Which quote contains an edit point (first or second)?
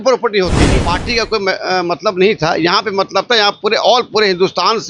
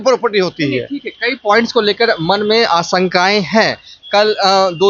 first